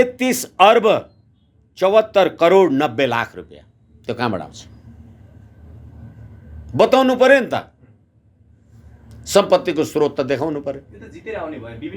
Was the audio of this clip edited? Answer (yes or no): no